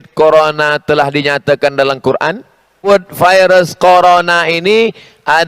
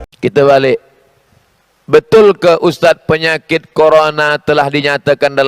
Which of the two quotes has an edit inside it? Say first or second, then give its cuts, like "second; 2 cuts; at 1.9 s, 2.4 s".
first; 1 cut; at 2.8 s